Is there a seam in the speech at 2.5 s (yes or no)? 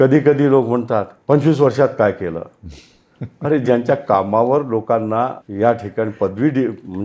no